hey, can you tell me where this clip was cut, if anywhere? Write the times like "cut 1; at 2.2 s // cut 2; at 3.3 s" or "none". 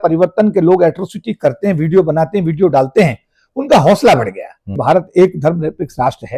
cut 1; at 4.8 s